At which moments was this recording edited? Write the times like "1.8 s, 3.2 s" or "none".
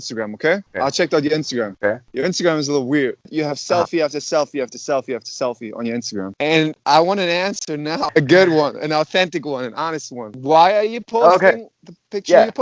2.1 s, 3.3 s, 6.3 s, 8.1 s, 10.3 s